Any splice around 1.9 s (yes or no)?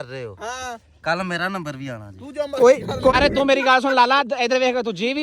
no